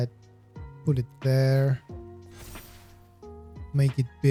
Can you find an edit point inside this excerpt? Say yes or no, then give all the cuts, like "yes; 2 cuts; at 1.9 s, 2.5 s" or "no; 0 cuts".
no; 0 cuts